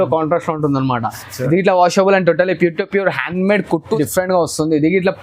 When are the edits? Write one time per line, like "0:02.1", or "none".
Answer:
0:04.0